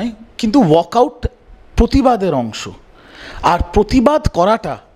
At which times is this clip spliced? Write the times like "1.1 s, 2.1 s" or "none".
none